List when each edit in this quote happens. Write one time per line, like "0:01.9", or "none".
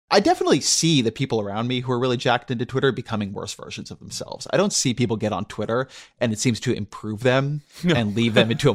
none